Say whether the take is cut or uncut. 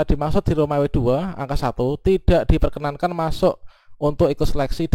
uncut